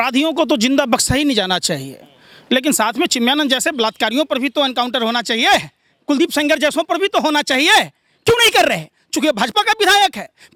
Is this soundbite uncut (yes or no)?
yes